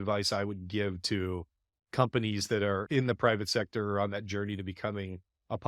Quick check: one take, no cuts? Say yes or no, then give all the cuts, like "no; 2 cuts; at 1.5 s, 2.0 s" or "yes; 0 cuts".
no; 1 cut; at 2.9 s